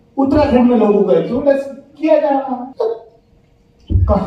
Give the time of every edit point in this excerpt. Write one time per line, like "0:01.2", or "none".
0:02.7